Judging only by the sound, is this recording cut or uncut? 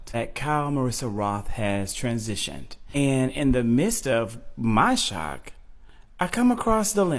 uncut